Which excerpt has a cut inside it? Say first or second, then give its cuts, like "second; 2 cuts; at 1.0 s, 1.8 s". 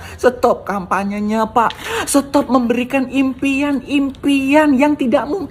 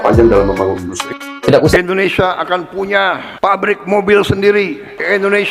second; 1 cut; at 1.7 s